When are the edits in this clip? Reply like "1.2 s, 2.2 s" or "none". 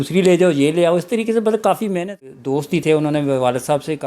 2.8 s